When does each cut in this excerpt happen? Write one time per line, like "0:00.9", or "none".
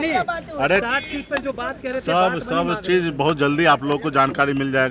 none